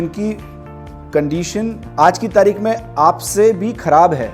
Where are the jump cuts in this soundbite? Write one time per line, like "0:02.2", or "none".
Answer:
0:01.8